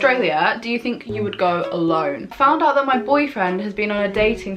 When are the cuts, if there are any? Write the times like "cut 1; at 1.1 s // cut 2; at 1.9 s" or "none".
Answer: cut 1; at 2.3 s